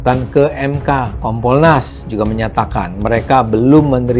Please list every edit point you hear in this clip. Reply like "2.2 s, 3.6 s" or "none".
1.2 s